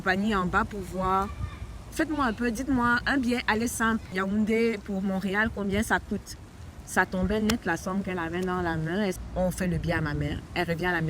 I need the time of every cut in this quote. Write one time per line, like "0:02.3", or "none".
0:04.1
0:09.2